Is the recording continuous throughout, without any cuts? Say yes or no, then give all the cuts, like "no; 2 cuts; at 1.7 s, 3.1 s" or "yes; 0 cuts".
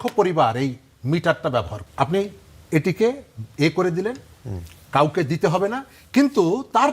no; 1 cut; at 1.8 s